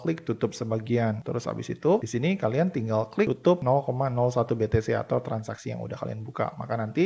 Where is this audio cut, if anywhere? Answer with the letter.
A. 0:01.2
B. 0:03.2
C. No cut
A